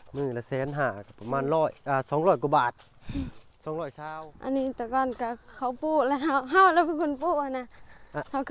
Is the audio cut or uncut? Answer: cut